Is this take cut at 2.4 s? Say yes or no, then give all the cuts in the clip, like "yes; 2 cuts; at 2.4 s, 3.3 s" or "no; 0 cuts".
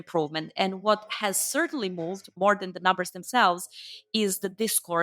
yes; 1 cut; at 2.4 s